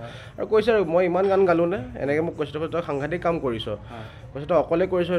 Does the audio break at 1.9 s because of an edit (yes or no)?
no